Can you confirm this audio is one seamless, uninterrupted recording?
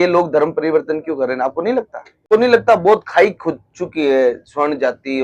no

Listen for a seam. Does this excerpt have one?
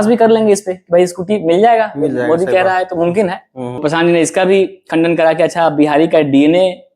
yes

